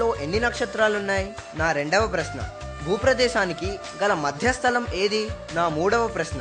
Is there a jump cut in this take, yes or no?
yes